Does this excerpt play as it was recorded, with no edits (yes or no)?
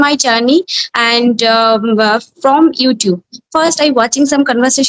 yes